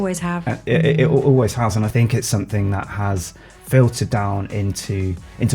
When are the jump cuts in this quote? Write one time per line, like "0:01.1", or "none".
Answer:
0:01.9